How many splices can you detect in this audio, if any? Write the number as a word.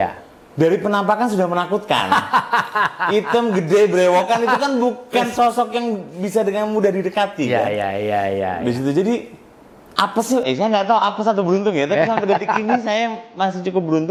zero